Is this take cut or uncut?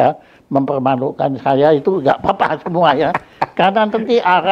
uncut